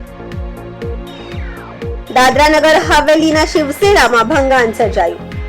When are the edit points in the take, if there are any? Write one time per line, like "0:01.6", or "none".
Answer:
0:01.0